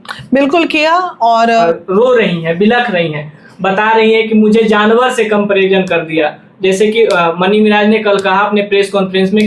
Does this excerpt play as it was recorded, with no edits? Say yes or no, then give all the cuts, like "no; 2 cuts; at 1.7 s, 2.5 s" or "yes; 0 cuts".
no; 1 cut; at 1.6 s